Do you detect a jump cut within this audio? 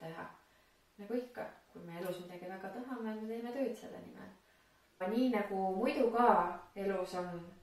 yes; 1 cut; at 5.0 s

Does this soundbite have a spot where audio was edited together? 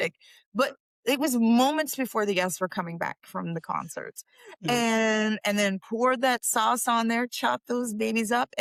no; 0 cuts

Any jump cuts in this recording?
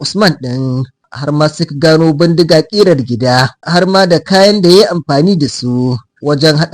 yes; 1 cut; at 3.6 s

